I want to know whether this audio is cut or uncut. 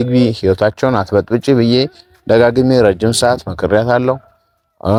uncut